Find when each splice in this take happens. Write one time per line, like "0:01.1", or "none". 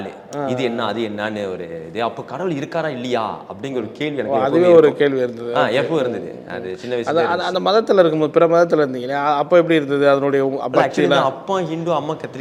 none